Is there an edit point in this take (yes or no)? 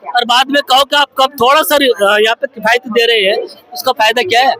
no